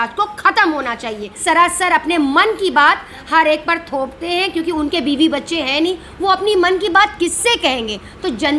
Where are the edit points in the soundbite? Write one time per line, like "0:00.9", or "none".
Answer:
0:01.4